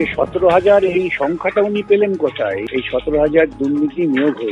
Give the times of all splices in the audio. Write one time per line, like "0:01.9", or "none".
0:02.6